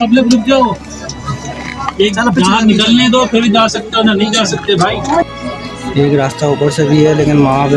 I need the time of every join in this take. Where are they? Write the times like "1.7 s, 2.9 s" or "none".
5.2 s